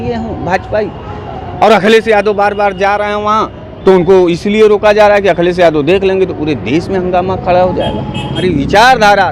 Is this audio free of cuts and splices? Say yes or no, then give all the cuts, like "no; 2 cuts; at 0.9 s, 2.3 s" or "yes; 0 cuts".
no; 1 cut; at 8.4 s